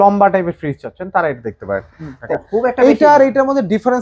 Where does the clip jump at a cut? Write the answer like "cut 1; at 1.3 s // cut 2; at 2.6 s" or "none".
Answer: cut 1; at 2.1 s